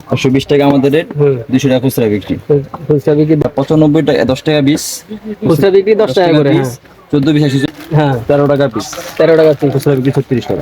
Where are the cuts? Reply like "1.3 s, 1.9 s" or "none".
3.4 s, 7.6 s